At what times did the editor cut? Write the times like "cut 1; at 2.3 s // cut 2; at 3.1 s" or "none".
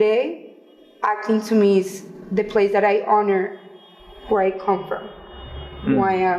none